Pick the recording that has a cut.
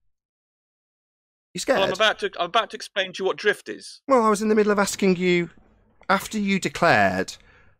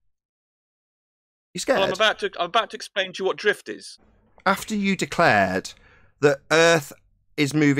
second; 1 cut; at 3.9 s

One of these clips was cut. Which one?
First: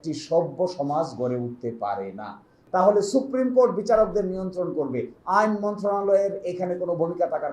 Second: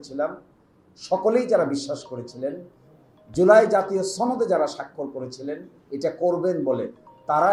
first; 1 cut; at 2.5 s

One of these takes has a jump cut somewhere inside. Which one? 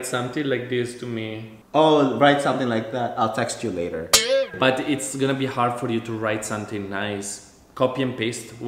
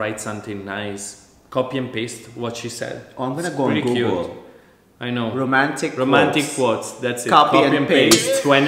first; 2 cuts; at 1.6 s, 4.5 s

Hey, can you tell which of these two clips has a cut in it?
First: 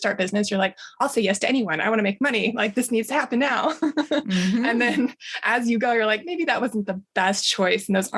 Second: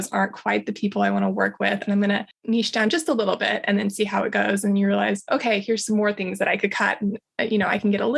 second; 1 cut; at 2.3 s

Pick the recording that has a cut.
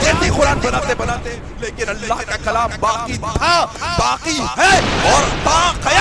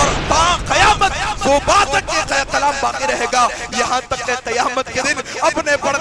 first; 1 cut; at 1.3 s

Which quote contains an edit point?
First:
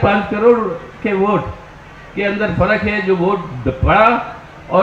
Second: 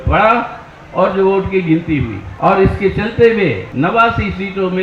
second; 2 cuts; at 2.2 s, 3.6 s

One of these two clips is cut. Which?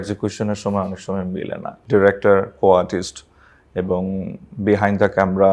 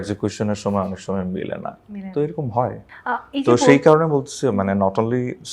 first; 1 cut; at 1.7 s

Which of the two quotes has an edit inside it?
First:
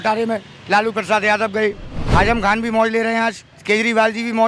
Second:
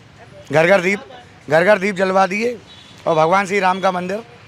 first; 2 cuts; at 1.9 s, 3.5 s

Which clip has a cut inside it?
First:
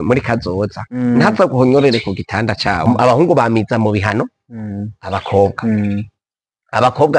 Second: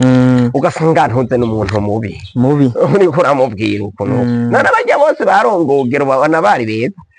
first; 1 cut; at 2.8 s

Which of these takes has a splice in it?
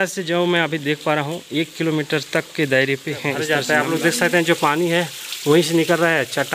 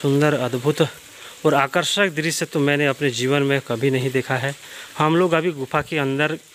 first; 1 cut; at 3.4 s

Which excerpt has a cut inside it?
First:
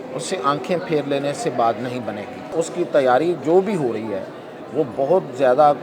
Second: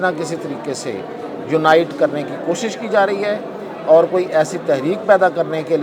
first; 1 cut; at 2.5 s

